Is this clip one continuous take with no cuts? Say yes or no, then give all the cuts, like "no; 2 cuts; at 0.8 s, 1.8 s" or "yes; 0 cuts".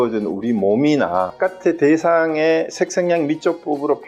no; 1 cut; at 1.3 s